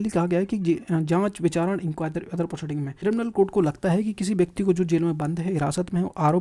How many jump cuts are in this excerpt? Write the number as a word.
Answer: one